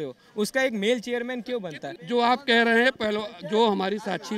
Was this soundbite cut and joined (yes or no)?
yes